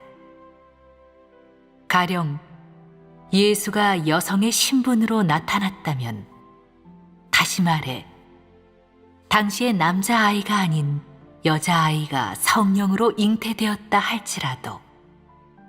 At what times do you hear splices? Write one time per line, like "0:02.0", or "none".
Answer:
0:10.4